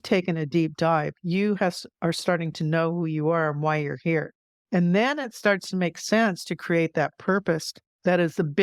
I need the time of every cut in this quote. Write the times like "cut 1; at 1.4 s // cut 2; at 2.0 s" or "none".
none